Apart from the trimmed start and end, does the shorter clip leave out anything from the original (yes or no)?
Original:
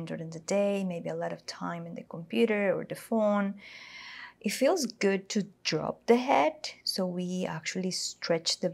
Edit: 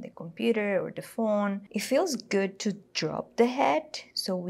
yes